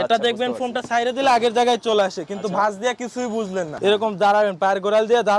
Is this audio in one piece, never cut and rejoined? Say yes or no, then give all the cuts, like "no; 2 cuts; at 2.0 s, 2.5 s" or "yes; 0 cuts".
no; 1 cut; at 3.7 s